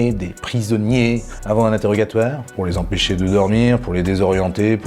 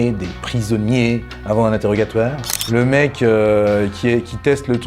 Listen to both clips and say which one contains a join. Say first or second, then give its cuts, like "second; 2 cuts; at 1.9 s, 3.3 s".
second; 1 cut; at 2.5 s